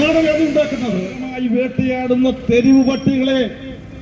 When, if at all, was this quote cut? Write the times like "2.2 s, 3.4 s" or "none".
1.3 s

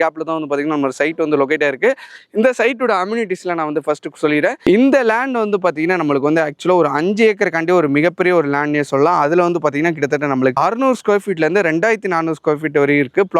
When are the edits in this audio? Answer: none

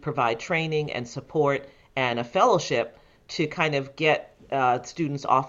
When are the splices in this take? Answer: none

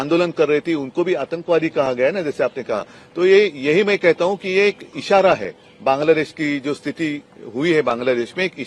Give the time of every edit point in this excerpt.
none

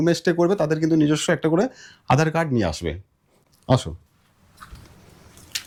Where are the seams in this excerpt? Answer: none

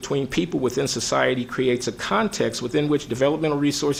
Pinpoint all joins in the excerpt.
none

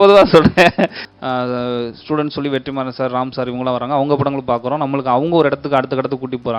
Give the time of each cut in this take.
1.0 s

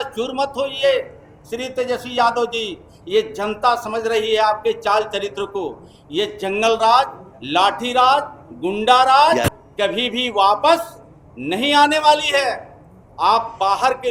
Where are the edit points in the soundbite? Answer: none

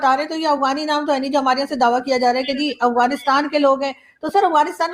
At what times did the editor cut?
none

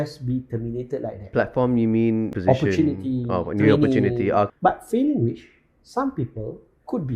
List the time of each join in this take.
1.2 s, 2.3 s, 4.5 s

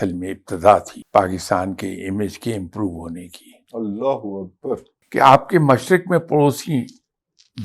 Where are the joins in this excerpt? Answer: 1.0 s, 5.0 s

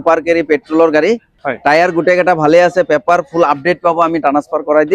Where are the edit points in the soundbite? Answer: 1.4 s

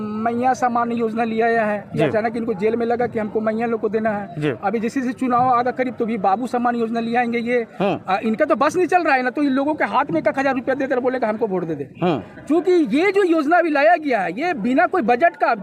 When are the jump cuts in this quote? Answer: none

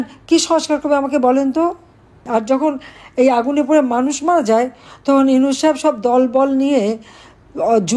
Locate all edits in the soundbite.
2.2 s

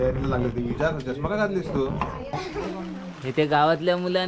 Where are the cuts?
2.2 s

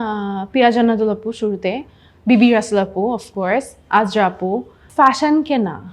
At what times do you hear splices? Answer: 4.8 s

